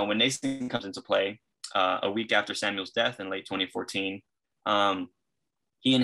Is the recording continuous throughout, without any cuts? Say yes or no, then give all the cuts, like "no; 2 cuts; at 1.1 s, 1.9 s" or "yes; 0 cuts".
yes; 0 cuts